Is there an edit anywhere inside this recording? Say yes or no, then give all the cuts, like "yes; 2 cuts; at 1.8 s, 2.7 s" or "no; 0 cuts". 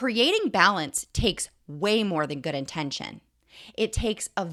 no; 0 cuts